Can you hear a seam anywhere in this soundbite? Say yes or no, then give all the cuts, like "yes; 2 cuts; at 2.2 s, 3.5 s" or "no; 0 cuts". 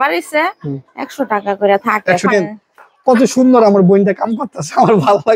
yes; 1 cut; at 2.3 s